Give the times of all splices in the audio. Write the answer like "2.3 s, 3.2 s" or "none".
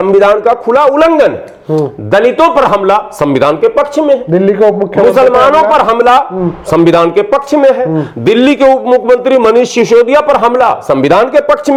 none

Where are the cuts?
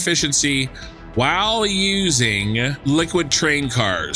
2.8 s

